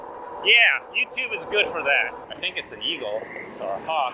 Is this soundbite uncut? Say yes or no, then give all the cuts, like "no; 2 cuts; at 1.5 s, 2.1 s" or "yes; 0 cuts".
no; 1 cut; at 2.2 s